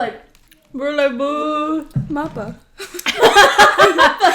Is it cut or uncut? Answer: cut